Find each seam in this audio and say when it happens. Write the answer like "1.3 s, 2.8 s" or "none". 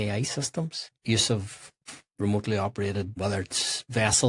0.9 s, 1.8 s, 3.2 s

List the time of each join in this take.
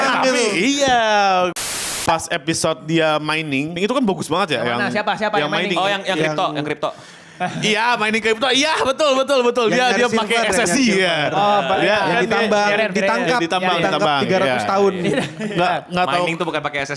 1.5 s, 3.7 s

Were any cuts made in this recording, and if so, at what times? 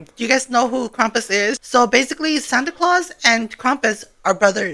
1.6 s

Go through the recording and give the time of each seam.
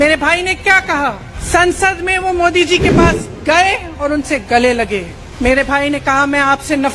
1.3 s, 5.2 s

